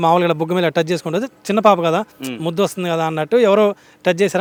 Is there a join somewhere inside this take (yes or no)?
no